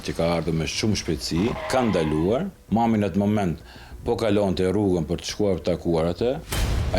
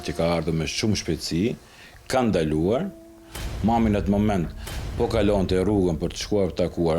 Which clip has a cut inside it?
first; 2 cuts; at 1.6 s, 2.6 s

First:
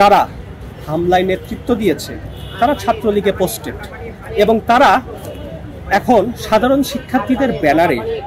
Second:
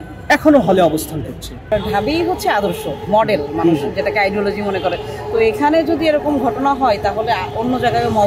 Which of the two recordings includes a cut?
second; 1 cut; at 1.6 s

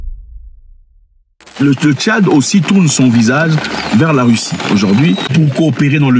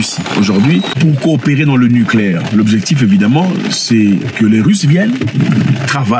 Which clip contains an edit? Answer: first; 1 cut; at 1.4 s

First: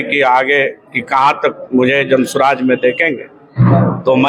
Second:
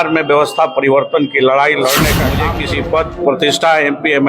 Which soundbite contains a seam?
second; 1 cut; at 2.5 s

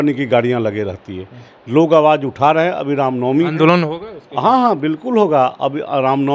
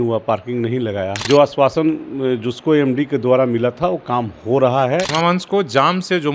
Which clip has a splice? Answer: second; 2 cuts; at 1.2 s, 5.1 s

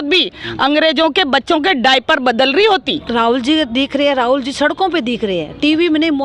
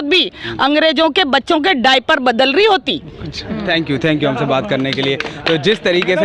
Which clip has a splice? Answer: first; 1 cut; at 3.0 s

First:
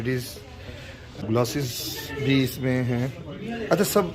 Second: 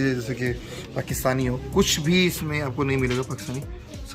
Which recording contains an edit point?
first; 1 cut; at 1.2 s

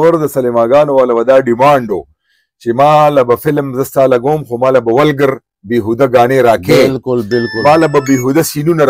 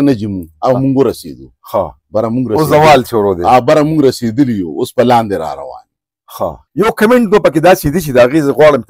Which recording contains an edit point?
second; 1 cut; at 6.6 s

